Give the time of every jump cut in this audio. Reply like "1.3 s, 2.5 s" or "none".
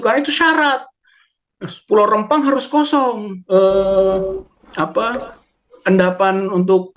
3.3 s